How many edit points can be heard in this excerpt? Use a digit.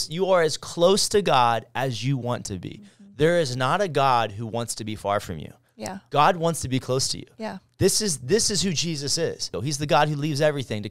1